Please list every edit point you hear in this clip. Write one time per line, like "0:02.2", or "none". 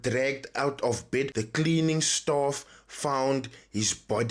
0:01.4